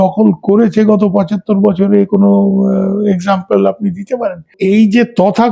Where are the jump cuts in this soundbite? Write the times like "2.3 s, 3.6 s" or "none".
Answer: 4.5 s